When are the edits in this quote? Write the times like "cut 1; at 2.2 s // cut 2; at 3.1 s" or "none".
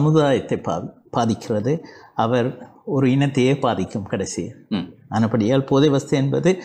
none

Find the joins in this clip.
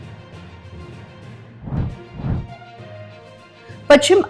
none

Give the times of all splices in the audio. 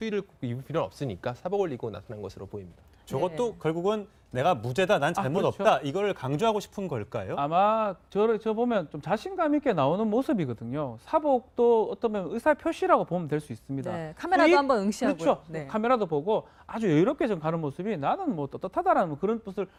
none

